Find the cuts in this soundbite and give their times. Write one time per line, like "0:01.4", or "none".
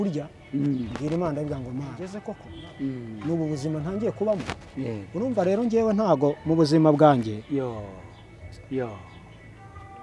0:02.2